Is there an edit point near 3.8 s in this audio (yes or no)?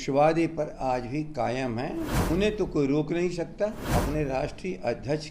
yes